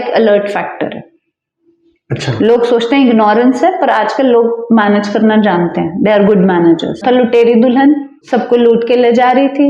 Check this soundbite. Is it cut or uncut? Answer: cut